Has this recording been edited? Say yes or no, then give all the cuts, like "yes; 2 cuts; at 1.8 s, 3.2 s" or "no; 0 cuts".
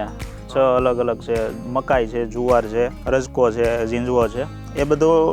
yes; 1 cut; at 3.0 s